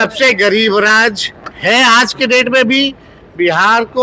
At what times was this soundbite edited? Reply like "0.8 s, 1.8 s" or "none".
none